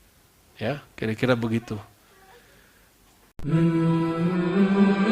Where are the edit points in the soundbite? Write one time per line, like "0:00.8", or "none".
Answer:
0:03.4